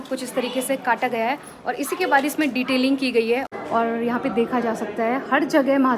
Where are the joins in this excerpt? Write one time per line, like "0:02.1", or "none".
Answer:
0:03.5